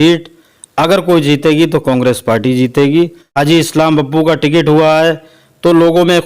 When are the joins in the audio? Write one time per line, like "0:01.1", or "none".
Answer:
0:03.3

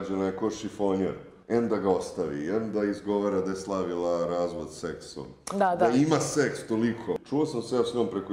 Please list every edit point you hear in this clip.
0:01.3
0:07.2

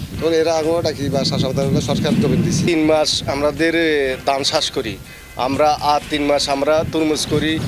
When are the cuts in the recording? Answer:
0:02.7

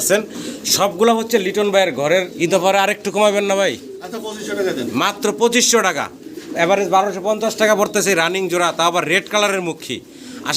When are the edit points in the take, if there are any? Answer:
0:02.3

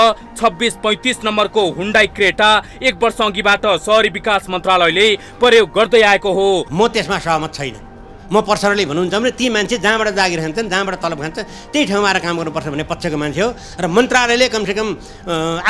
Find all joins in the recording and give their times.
0:06.7

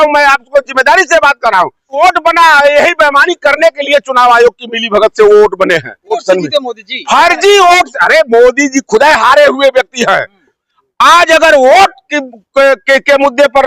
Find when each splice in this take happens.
0:02.0
0:06.2
0:10.6

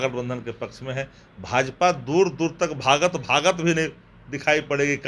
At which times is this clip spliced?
none

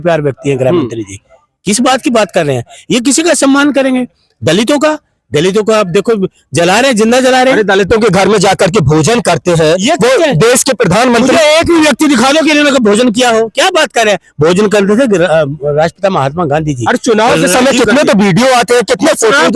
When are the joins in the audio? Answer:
none

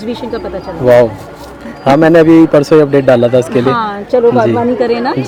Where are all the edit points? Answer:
none

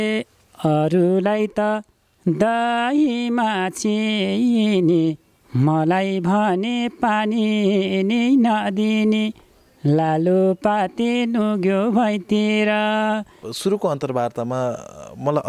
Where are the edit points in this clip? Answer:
0:13.4

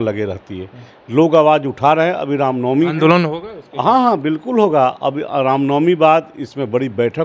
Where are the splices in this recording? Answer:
none

